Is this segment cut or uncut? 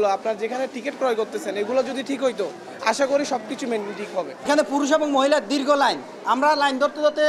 uncut